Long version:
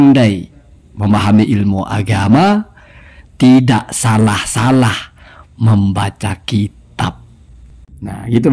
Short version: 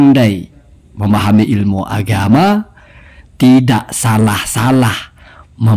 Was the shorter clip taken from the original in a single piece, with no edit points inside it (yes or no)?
yes